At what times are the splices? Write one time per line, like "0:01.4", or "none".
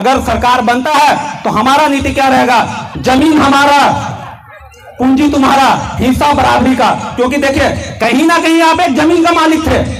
none